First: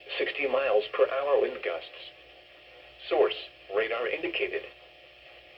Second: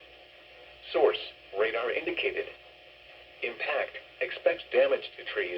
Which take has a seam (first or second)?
second